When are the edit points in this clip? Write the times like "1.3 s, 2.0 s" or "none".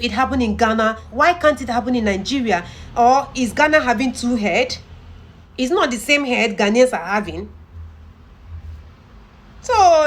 1.0 s, 5.4 s